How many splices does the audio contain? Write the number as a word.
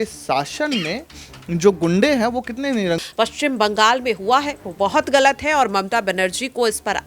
one